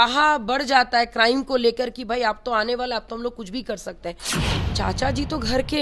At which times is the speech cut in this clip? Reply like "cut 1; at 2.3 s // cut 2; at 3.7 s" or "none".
cut 1; at 4.3 s